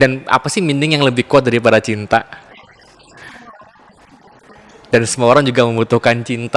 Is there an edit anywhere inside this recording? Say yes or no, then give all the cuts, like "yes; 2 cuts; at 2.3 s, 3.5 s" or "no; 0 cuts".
no; 0 cuts